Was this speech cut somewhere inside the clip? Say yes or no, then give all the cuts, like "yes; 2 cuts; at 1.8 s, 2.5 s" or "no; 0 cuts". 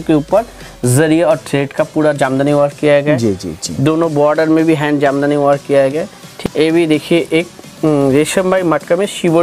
yes; 1 cut; at 6.2 s